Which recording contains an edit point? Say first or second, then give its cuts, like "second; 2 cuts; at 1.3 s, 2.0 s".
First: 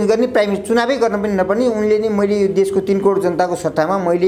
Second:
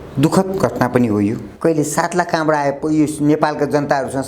second; 1 cut; at 1.5 s